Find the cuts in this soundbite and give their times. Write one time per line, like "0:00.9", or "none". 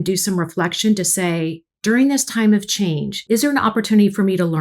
0:03.1